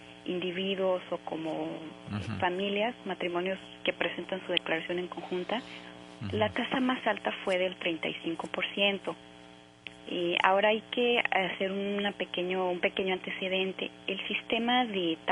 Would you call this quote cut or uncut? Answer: uncut